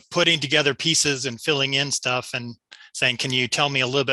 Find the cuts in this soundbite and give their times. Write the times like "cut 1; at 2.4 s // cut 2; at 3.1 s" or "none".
none